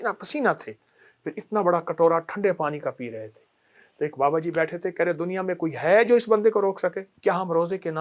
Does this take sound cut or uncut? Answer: cut